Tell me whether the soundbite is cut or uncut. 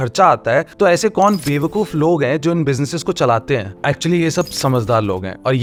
uncut